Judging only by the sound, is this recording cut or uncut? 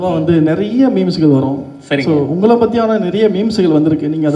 uncut